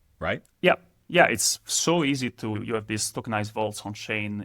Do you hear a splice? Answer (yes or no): yes